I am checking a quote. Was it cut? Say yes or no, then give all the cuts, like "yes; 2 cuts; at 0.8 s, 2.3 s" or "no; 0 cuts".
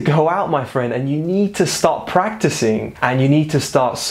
yes; 1 cut; at 2.9 s